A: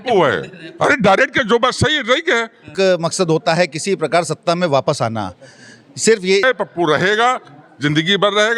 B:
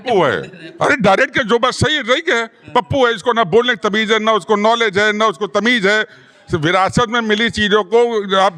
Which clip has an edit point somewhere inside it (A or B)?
A